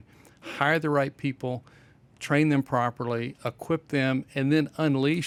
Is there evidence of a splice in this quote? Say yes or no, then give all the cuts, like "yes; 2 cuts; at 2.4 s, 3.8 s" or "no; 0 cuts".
no; 0 cuts